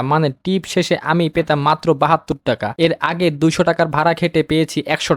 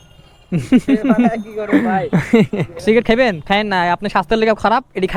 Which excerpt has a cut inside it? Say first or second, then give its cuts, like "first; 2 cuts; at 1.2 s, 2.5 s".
second; 1 cut; at 2.7 s